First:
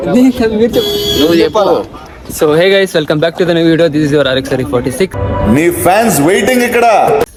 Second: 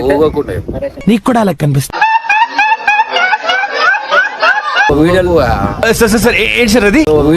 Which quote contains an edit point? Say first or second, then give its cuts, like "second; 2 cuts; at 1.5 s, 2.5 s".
second; 2 cuts; at 0.9 s, 4.9 s